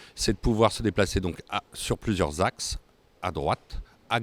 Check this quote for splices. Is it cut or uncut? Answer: uncut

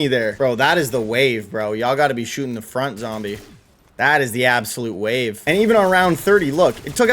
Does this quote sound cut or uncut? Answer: cut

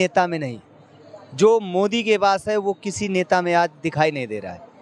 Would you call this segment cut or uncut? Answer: uncut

